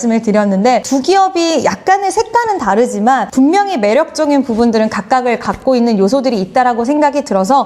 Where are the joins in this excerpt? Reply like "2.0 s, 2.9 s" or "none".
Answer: 0.8 s, 3.3 s